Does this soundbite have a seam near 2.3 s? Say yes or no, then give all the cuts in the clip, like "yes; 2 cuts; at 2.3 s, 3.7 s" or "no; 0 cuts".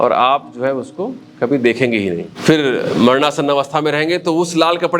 yes; 1 cut; at 2.3 s